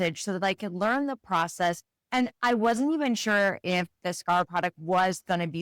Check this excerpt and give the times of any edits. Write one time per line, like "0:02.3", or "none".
0:04.5